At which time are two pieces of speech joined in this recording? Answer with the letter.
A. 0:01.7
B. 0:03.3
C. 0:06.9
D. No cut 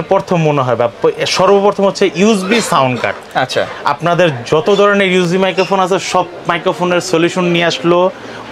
D